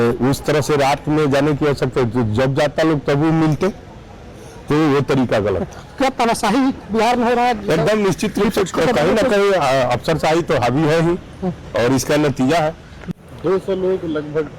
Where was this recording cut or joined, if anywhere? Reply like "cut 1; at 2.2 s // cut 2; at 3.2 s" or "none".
cut 1; at 13.1 s